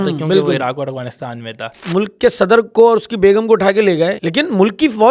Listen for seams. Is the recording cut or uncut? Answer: cut